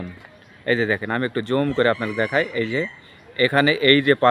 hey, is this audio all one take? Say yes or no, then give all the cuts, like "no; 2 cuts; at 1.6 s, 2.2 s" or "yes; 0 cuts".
yes; 0 cuts